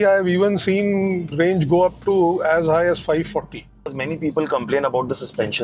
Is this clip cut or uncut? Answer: cut